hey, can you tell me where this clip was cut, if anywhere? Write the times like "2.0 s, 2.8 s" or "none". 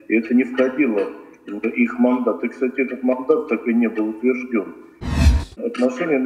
5.2 s